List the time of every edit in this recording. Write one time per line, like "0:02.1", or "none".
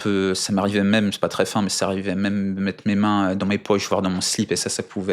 none